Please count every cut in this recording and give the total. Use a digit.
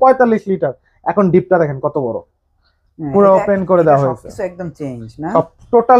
0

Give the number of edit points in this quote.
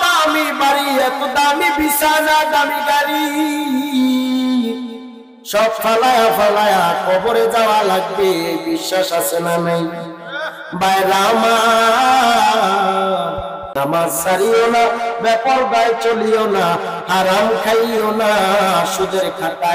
1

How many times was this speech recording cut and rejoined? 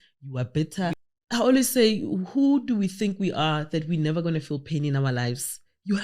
1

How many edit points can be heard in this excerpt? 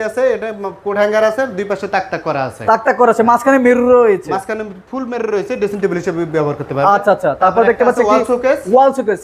0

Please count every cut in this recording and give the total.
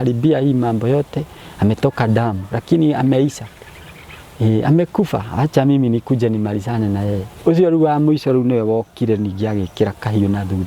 0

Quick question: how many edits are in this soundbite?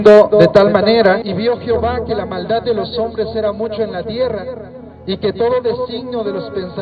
1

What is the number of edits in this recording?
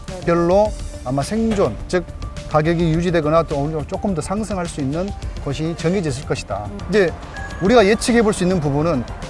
1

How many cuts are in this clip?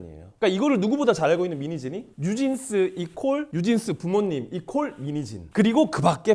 1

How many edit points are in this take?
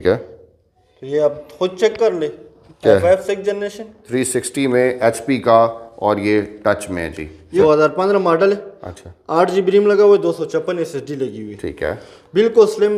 2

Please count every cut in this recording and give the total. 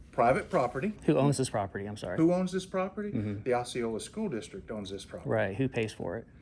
1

